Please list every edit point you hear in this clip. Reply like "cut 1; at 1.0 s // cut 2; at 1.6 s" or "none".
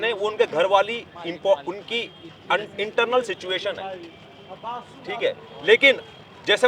none